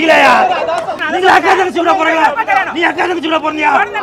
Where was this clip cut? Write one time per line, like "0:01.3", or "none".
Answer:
0:01.0